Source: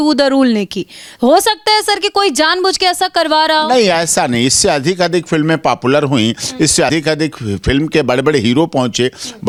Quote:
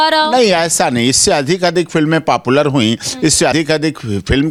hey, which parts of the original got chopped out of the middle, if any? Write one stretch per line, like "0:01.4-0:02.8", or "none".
none